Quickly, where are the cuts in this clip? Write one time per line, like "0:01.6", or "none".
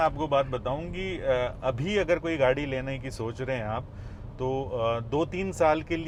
none